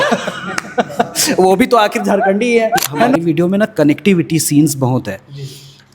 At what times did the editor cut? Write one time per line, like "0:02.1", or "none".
0:03.1